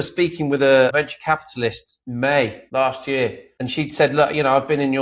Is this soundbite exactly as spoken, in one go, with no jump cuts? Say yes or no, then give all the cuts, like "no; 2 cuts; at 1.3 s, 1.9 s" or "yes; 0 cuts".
no; 4 cuts; at 0.9 s, 1.9 s, 2.6 s, 3.5 s